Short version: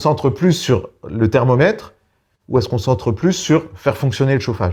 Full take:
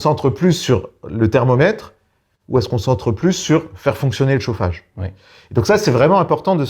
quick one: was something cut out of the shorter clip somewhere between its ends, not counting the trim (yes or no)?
no